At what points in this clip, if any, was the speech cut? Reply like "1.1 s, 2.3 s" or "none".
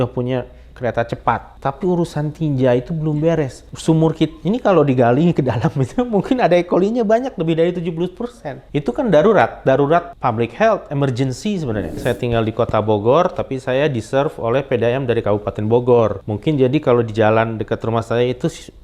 1.5 s, 3.6 s, 8.6 s, 10.1 s, 12.0 s, 16.3 s